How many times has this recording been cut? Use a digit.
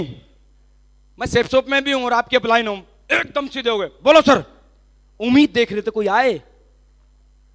0